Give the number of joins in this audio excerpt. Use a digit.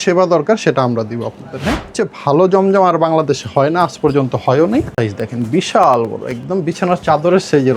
2